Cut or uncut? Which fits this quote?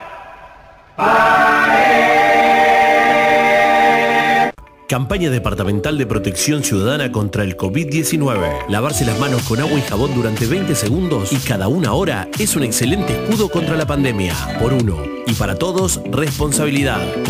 cut